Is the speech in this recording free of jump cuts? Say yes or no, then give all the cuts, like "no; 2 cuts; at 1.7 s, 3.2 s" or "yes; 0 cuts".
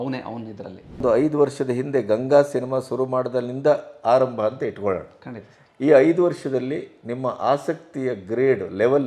no; 1 cut; at 1.0 s